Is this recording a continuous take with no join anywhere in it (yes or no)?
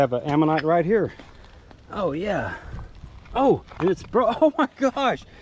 yes